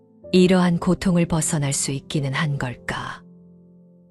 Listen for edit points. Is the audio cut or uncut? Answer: cut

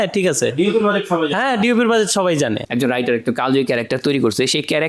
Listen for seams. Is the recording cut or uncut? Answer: cut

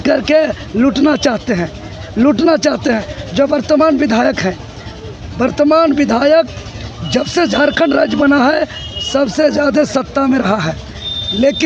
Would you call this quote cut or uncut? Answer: uncut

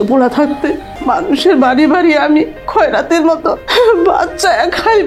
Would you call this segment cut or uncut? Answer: cut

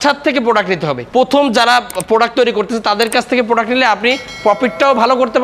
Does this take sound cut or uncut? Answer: cut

